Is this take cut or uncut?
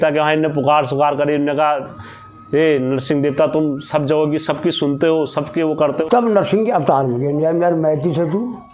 cut